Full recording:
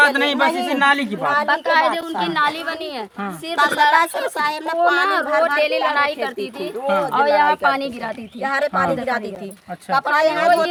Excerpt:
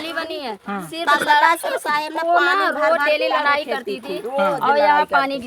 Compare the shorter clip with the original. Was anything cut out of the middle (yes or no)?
no